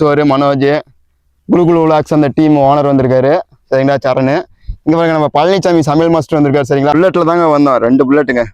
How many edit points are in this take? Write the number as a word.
one